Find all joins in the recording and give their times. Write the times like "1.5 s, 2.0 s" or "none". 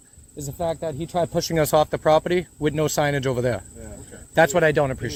none